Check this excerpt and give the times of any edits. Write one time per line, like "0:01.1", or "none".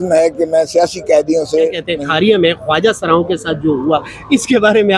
0:01.8